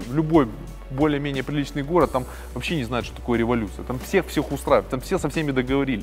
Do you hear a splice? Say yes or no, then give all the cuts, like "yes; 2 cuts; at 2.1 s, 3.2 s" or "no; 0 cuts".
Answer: no; 0 cuts